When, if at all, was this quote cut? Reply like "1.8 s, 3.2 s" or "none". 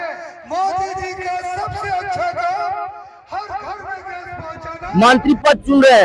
4.9 s